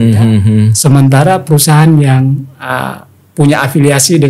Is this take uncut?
yes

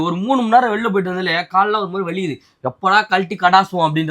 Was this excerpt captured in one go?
yes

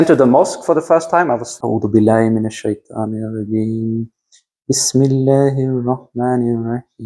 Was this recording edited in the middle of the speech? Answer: yes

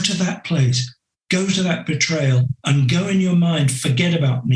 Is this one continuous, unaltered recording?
no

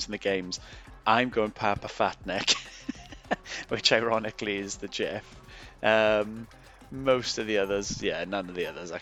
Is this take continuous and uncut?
yes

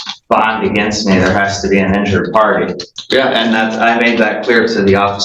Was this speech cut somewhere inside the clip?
yes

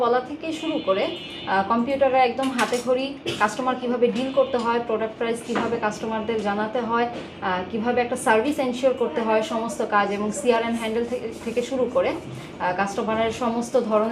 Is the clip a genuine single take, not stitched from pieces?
yes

